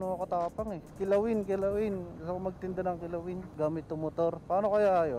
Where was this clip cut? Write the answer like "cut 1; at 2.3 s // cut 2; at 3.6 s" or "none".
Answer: cut 1; at 0.9 s // cut 2; at 3.5 s // cut 3; at 4.4 s